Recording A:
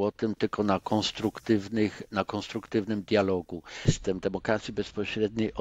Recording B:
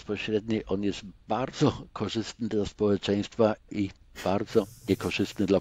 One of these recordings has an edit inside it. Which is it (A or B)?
A